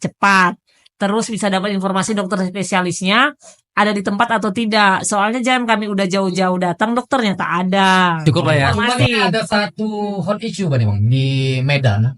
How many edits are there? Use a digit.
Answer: 1